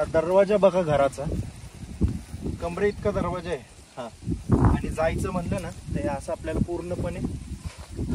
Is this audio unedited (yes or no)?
yes